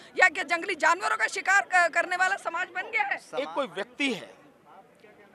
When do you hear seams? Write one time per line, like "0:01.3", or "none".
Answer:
0:03.2